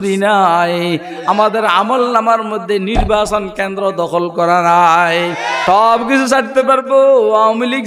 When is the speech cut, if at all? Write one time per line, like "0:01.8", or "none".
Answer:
0:05.6